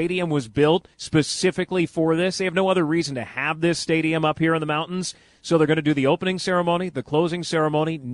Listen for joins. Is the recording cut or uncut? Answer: cut